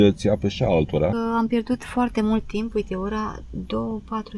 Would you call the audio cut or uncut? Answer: cut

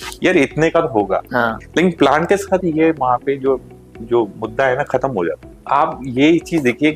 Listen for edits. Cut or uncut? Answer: cut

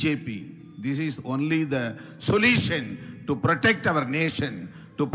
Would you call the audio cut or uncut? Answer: uncut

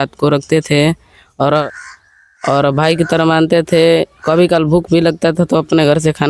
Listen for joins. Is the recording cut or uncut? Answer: cut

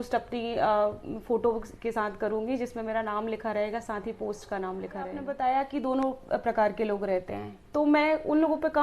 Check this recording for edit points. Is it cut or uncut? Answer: cut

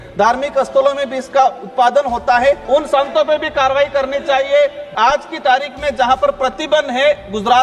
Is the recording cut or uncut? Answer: cut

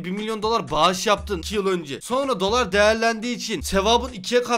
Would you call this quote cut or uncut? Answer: cut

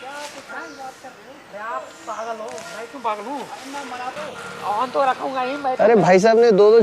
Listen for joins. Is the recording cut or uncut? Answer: cut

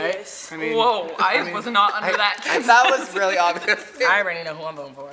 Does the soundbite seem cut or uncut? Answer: cut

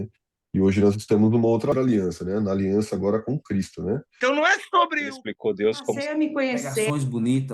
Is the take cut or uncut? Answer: cut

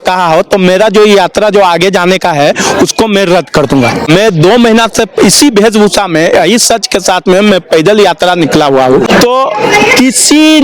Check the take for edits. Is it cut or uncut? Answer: cut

